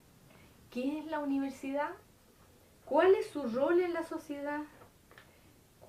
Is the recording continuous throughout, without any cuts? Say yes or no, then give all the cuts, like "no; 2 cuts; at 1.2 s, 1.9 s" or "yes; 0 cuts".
yes; 0 cuts